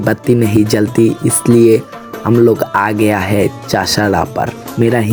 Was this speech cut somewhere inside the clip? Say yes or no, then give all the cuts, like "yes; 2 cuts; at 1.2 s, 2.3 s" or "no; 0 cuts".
no; 0 cuts